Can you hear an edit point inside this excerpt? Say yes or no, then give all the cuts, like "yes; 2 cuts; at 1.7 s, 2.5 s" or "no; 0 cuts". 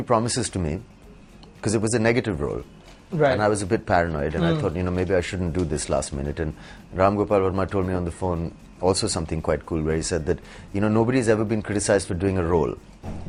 no; 0 cuts